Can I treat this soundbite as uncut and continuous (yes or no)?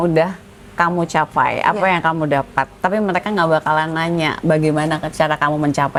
yes